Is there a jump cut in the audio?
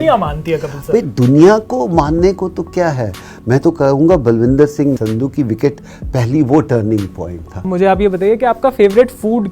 yes; 2 cuts; at 5.0 s, 7.7 s

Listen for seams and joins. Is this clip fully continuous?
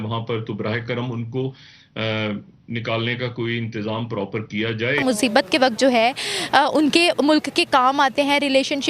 no; 1 cut; at 5.1 s

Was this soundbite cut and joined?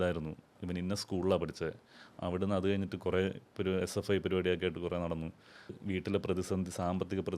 yes; 1 cut; at 5.8 s

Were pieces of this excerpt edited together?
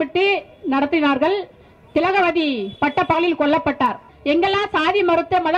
yes; 1 cut; at 4.1 s

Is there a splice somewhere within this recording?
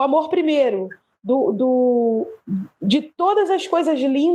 no; 0 cuts

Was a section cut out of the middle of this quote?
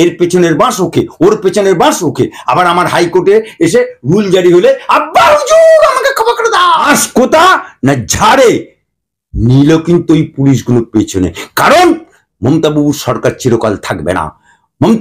yes; 1 cut; at 6.9 s

